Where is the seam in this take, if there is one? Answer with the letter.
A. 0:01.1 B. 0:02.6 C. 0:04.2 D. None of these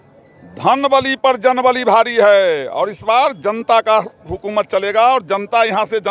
D